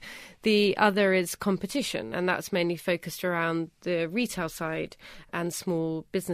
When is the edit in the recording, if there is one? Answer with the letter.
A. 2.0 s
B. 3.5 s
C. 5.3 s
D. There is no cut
C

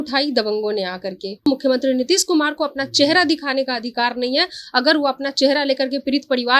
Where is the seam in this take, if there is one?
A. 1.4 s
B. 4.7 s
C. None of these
A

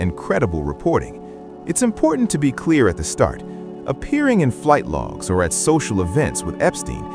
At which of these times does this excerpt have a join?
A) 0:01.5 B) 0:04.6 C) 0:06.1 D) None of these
A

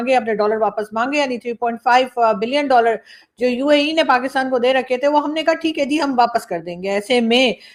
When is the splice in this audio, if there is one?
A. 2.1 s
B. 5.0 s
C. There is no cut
C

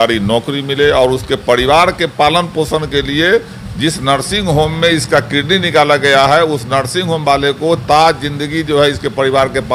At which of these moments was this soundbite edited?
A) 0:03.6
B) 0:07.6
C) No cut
C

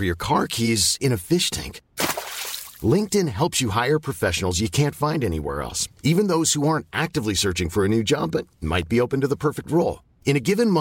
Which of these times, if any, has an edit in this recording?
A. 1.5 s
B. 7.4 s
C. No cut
C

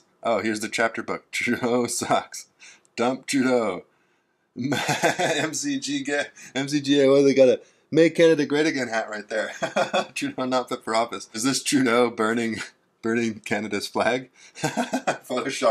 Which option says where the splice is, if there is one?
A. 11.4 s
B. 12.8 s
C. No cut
A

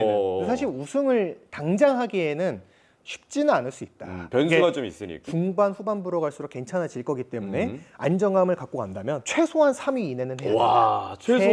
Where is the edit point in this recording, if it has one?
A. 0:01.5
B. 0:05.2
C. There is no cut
B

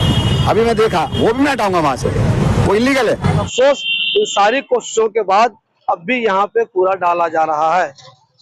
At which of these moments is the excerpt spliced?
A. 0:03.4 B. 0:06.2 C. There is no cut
A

